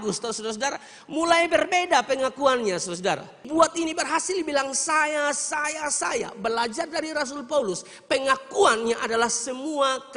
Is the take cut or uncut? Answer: cut